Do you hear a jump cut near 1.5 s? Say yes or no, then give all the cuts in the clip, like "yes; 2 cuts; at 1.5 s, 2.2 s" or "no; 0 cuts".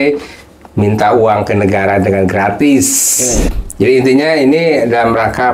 no; 1 cut; at 3.5 s